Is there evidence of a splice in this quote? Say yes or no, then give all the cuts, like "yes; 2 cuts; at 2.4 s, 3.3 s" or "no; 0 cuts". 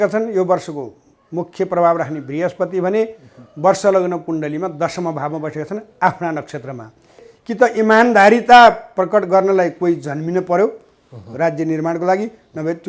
yes; 1 cut; at 7.3 s